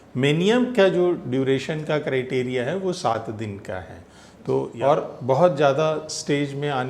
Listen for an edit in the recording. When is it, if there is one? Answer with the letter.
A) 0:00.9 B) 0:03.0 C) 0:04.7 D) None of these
C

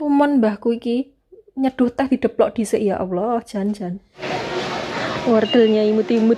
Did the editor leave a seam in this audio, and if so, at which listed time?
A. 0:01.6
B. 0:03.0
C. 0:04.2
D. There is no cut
C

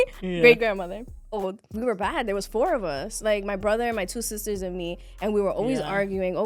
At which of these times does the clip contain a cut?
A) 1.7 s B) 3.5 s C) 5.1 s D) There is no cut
A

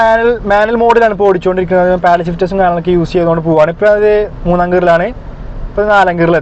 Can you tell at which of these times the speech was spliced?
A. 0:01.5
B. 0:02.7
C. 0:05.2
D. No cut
D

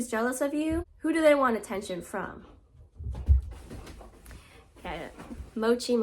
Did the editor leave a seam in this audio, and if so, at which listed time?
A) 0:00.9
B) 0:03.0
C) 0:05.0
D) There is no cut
A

